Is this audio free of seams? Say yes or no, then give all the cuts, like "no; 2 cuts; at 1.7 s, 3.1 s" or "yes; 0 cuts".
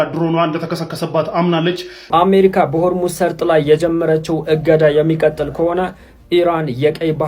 no; 1 cut; at 2.0 s